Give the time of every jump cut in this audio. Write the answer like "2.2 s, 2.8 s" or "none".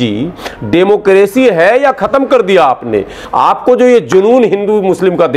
3.2 s